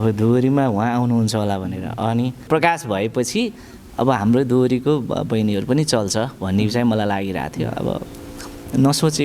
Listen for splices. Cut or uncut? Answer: cut